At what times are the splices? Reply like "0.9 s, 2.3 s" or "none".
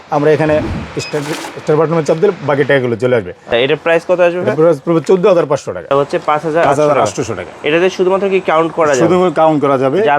3.5 s, 5.9 s